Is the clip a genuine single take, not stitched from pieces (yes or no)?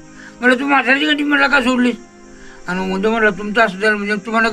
yes